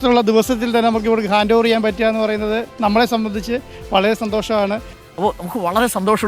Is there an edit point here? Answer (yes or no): no